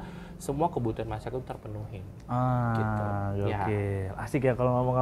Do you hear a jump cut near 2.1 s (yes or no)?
no